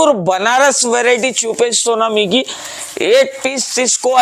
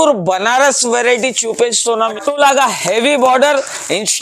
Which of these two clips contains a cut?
second; 1 cut; at 2.1 s

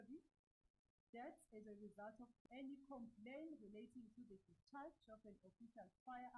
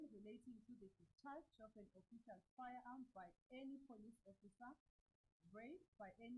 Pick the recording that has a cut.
first; 1 cut; at 2.3 s

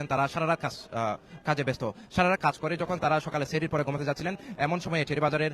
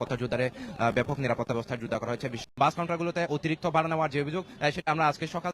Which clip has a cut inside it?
second; 1 cut; at 2.4 s

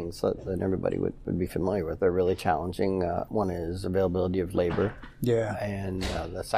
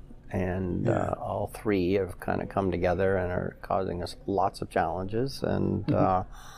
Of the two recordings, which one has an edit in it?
first; 2 cuts; at 1.9 s, 3.3 s

